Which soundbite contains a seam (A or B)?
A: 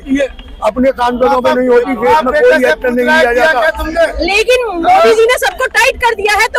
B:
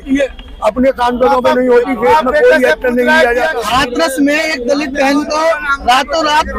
B